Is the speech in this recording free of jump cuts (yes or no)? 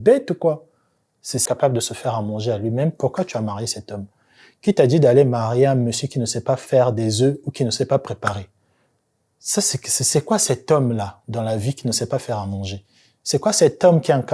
no